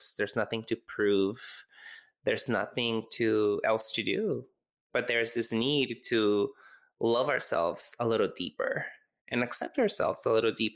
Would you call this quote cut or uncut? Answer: uncut